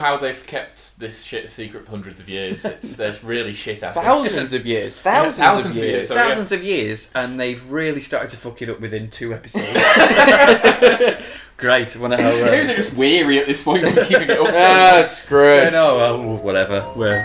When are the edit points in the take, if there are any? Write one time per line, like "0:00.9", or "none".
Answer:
none